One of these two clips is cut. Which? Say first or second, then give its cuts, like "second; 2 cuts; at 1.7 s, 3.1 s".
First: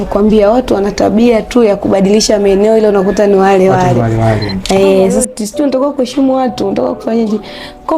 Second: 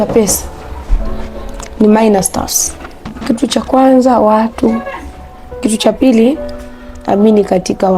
first; 1 cut; at 5.2 s